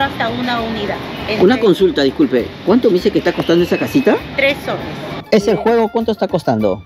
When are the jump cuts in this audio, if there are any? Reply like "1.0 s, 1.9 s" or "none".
1.2 s, 5.2 s